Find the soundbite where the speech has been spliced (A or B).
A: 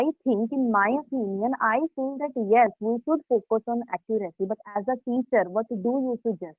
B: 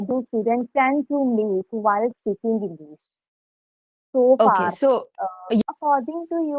B